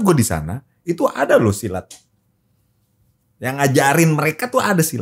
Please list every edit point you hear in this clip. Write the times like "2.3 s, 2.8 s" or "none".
none